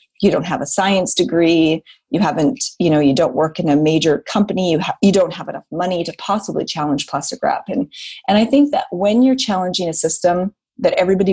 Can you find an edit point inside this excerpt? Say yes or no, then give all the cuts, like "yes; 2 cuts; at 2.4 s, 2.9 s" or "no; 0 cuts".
no; 0 cuts